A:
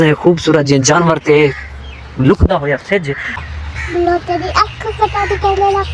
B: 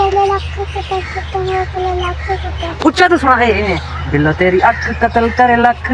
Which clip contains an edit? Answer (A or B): A